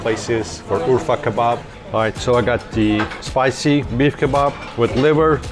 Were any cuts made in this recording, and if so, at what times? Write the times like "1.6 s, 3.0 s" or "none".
1.7 s, 3.9 s